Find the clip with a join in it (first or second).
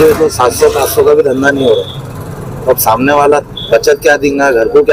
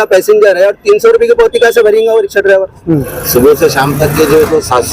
second